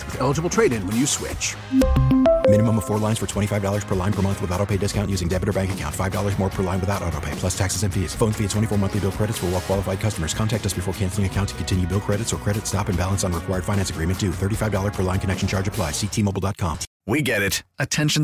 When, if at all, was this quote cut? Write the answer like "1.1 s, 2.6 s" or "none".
16.9 s